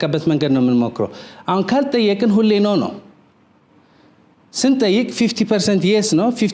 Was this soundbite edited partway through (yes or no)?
no